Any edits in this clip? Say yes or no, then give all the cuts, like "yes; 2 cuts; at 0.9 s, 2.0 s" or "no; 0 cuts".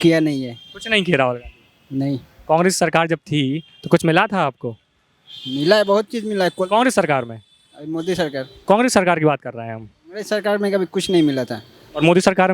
no; 0 cuts